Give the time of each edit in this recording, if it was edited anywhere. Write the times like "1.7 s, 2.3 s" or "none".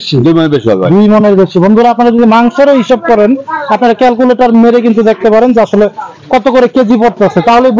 none